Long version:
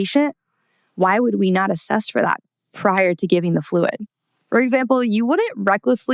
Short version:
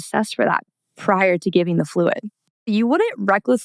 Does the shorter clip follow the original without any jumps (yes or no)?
no